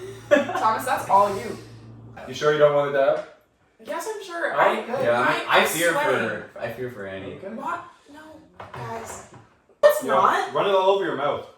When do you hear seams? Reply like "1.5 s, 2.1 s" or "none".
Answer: 2.2 s, 9.8 s